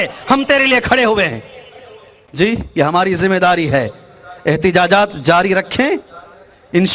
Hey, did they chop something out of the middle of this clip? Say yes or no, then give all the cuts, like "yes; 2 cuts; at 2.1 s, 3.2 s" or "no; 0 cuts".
no; 0 cuts